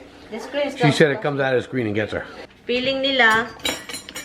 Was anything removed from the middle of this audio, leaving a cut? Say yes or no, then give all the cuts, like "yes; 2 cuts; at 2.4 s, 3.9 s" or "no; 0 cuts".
yes; 1 cut; at 2.5 s